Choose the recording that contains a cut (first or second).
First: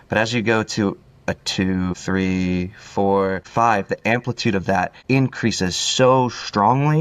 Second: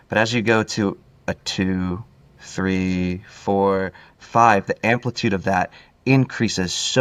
first